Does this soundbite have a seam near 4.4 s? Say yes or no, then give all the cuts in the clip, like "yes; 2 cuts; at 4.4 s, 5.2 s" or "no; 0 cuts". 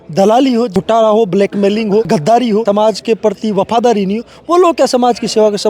no; 2 cuts; at 0.7 s, 2.6 s